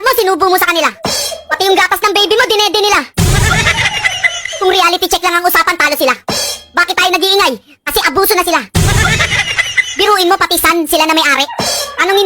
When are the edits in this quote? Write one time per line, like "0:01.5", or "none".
0:08.9

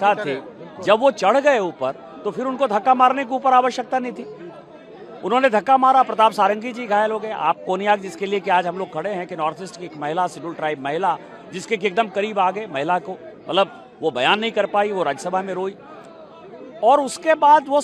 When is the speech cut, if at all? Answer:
none

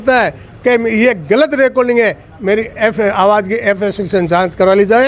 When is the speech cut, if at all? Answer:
none

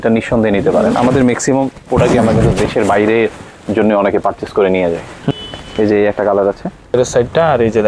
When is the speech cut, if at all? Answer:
0:05.3
0:06.9

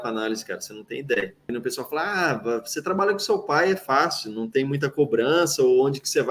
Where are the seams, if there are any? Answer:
0:01.4

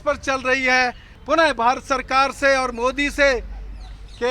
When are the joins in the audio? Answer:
0:01.1

